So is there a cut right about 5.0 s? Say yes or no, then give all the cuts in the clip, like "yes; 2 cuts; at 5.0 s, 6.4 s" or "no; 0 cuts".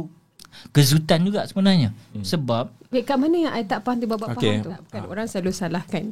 yes; 1 cut; at 5.0 s